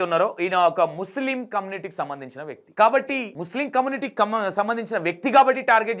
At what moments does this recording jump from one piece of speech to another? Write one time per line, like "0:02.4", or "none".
0:02.6
0:03.4